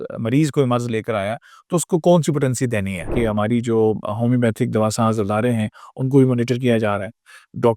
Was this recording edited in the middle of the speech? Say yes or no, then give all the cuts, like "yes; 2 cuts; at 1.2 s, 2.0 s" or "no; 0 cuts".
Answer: yes; 1 cut; at 3.1 s